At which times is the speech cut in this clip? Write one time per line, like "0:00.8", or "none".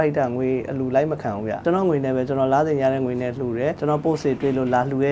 0:01.6
0:03.8